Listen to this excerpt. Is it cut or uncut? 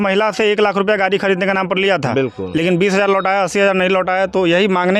uncut